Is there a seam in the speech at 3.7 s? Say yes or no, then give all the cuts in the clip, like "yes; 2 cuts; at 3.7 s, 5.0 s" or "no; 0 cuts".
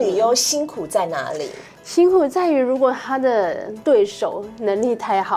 yes; 1 cut; at 3.7 s